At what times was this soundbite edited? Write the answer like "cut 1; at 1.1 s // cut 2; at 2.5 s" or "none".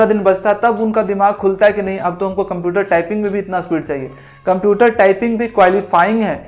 none